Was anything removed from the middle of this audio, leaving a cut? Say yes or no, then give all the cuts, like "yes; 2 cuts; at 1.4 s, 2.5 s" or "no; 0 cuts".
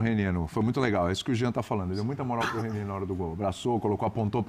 no; 0 cuts